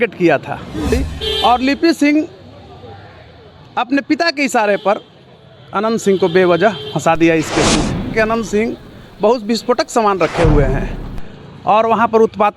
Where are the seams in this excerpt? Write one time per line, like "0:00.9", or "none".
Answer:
0:00.9
0:08.1